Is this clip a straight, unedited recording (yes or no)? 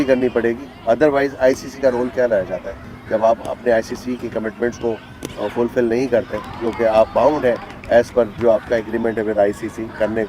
yes